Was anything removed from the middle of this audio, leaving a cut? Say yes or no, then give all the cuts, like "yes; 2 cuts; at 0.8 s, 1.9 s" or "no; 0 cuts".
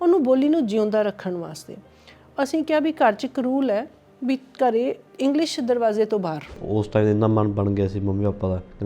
yes; 1 cut; at 6.6 s